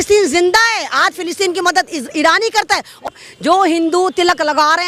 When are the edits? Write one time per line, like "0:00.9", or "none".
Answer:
0:03.0